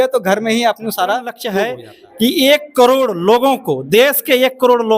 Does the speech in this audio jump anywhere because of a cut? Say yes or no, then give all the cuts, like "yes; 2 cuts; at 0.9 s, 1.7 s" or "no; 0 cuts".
yes; 1 cut; at 1.4 s